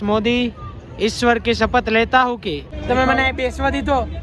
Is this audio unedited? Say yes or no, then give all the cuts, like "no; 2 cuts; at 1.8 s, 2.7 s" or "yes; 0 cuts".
no; 1 cut; at 2.7 s